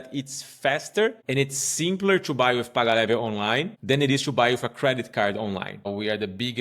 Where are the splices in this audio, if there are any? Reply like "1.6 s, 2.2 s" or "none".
1.2 s, 3.7 s, 5.8 s